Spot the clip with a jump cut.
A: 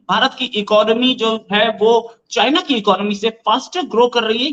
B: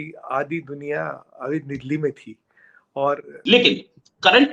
B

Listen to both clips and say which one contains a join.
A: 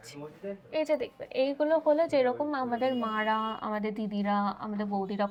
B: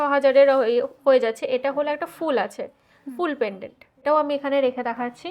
B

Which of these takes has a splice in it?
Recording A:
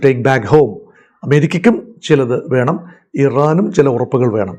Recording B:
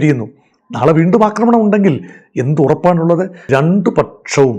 B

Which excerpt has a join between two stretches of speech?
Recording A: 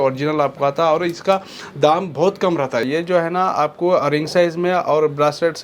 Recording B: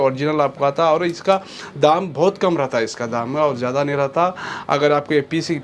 A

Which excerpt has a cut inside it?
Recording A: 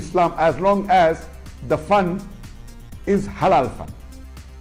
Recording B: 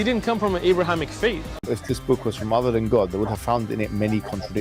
B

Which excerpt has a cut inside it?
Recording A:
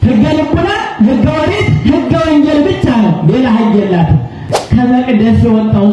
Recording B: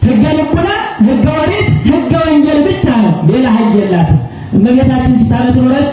A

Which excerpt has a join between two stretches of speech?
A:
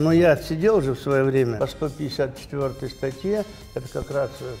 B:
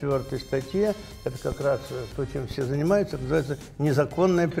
A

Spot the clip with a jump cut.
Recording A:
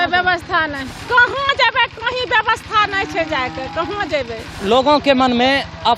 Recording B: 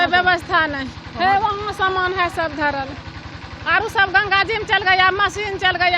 A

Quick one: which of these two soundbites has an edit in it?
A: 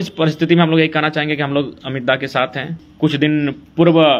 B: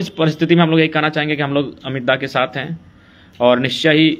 A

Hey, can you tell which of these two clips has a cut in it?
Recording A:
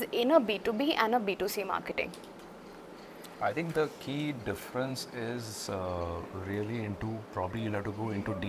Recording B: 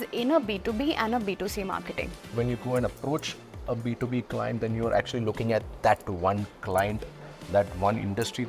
B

